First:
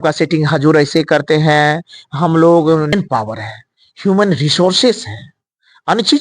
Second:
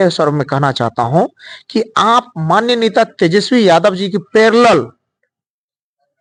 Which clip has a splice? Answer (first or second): first